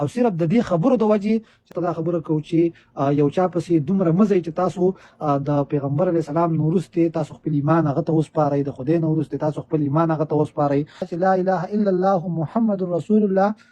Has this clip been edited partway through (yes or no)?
yes